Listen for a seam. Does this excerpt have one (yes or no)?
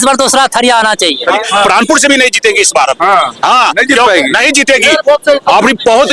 yes